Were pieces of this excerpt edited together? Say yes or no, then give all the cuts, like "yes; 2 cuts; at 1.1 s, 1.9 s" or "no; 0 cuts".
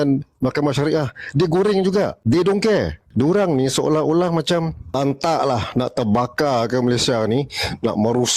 yes; 3 cuts; at 2.2 s, 3.0 s, 5.0 s